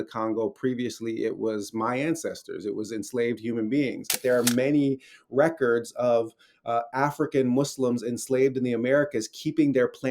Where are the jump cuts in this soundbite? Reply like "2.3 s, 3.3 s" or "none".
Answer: 4.1 s